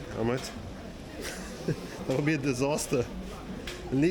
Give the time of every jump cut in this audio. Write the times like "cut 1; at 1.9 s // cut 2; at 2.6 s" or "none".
none